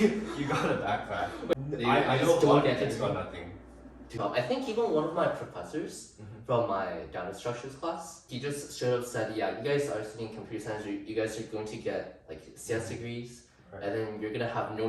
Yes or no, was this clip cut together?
yes